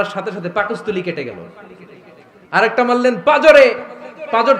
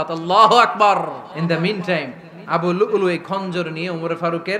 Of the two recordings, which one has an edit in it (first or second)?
second